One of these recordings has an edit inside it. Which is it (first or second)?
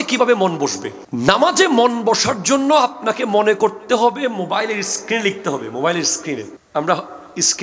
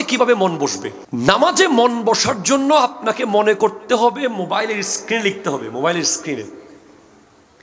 first